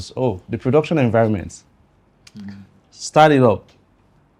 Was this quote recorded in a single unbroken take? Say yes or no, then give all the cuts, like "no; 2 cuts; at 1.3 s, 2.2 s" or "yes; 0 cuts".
yes; 0 cuts